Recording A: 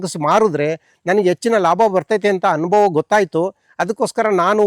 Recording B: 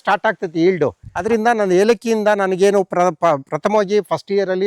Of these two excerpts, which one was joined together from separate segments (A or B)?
B